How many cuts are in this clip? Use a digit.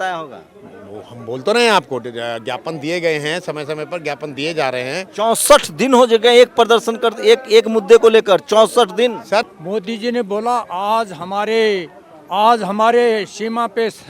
1